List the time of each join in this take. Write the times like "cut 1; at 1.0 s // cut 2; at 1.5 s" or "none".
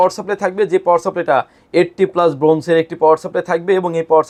none